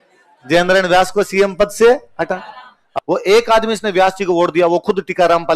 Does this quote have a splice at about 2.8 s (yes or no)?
yes